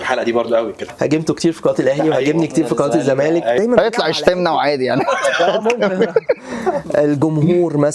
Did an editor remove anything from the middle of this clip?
yes; 2 cuts; at 0.9 s, 3.6 s

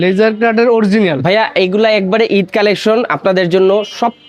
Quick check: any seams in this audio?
no; 0 cuts

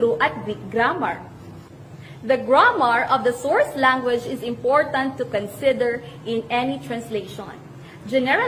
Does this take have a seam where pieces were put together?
no; 0 cuts

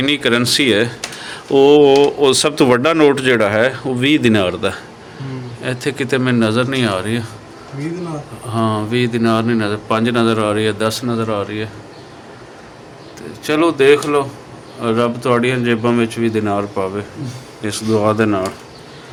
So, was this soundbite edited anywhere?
no; 0 cuts

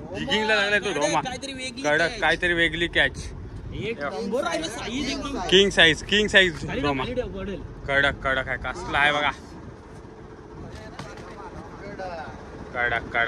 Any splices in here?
no; 0 cuts

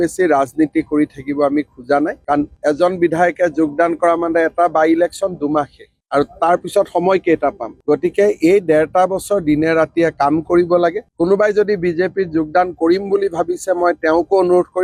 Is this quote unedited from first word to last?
yes; 0 cuts

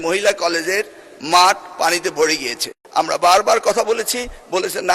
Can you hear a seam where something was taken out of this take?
yes; 1 cut; at 2.7 s

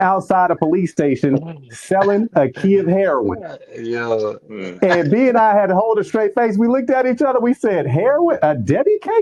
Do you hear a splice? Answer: no; 0 cuts

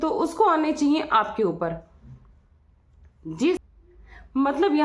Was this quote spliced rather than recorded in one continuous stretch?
yes; 1 cut; at 3.6 s

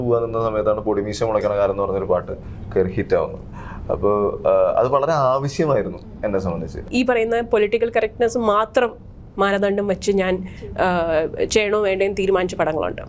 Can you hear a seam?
yes; 1 cut; at 6.8 s

